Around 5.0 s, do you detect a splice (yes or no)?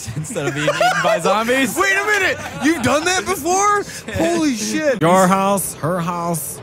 yes